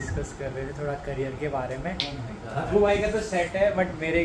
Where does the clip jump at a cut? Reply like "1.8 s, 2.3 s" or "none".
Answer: none